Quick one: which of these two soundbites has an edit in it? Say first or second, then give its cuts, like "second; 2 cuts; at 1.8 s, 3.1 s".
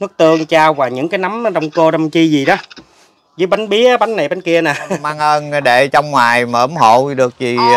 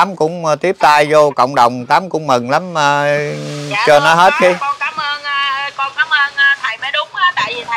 first; 1 cut; at 5.1 s